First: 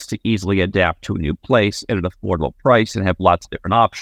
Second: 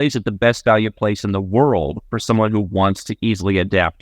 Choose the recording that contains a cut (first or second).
second